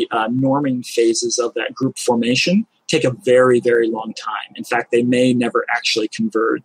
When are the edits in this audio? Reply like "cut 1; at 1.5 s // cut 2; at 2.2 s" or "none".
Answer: none